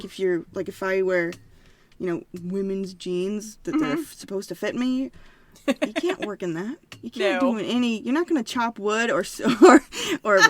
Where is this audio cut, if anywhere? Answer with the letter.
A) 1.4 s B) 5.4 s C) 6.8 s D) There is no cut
D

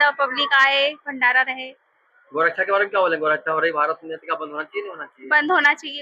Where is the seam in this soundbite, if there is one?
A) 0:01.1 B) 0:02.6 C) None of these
C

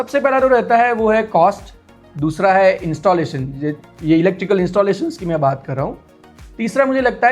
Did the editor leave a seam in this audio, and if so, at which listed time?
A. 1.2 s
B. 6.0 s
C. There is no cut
C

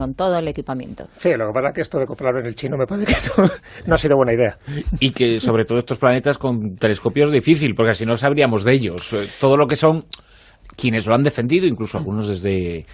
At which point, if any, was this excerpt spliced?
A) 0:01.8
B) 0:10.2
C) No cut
A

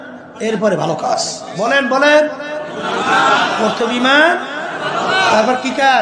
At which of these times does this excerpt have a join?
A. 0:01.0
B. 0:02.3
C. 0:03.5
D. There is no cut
D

